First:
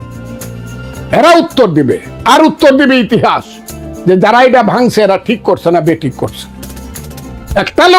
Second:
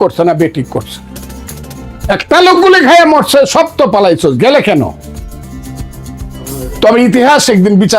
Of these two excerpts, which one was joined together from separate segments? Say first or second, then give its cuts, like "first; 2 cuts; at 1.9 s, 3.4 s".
second; 1 cut; at 5.4 s